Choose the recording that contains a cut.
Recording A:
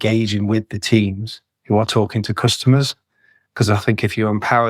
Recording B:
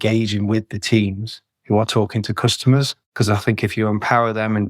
B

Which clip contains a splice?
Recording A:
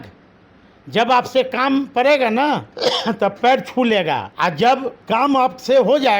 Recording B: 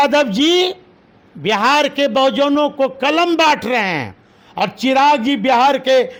A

